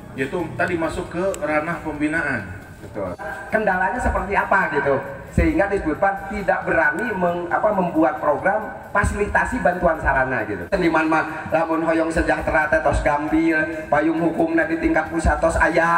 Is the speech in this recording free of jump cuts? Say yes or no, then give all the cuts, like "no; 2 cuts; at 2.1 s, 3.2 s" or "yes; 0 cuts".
no; 2 cuts; at 3.3 s, 10.7 s